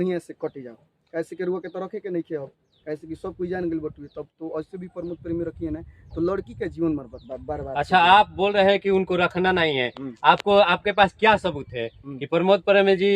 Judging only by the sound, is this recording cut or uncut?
uncut